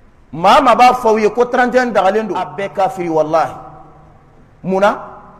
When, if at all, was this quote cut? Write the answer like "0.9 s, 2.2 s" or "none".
2.6 s